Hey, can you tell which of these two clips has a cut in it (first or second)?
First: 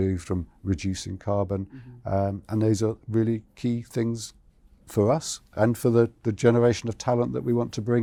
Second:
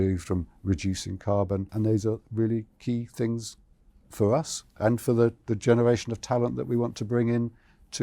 second